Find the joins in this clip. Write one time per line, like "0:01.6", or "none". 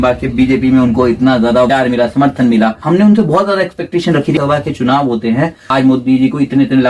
0:01.7
0:02.8
0:04.4
0:05.6